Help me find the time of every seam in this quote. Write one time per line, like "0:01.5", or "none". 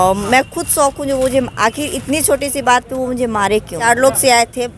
0:03.8